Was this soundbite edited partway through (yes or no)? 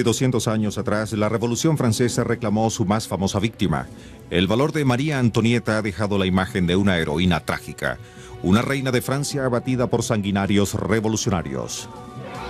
yes